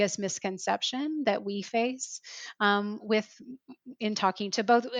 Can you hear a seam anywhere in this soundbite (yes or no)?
no